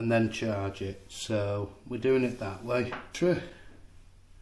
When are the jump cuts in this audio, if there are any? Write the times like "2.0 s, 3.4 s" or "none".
3.1 s